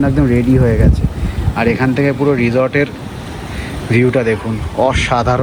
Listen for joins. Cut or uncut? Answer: uncut